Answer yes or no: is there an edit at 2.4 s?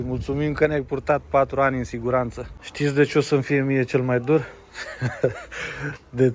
yes